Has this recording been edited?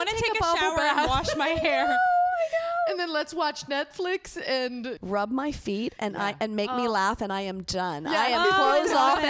yes; 1 cut; at 5.0 s

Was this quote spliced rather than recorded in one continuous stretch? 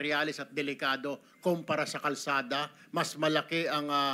no; 0 cuts

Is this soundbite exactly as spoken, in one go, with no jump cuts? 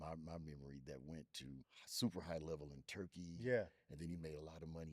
no; 1 cut; at 1.8 s

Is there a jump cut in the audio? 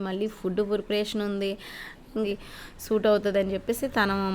yes; 1 cut; at 2.3 s

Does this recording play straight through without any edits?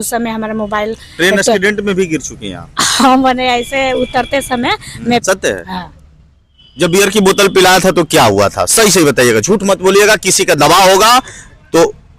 no; 1 cut; at 5.2 s

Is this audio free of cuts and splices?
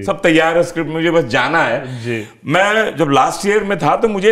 yes; 0 cuts

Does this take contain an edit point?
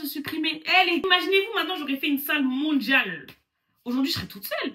yes; 1 cut; at 1.0 s

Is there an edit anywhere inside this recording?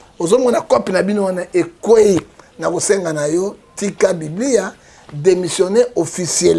no; 0 cuts

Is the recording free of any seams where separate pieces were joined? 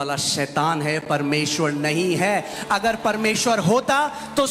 yes; 0 cuts

